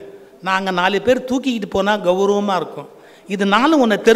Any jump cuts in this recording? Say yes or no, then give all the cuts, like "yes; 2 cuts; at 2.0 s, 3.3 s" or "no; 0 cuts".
no; 0 cuts